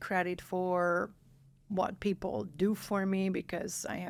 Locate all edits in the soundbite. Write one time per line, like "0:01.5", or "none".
none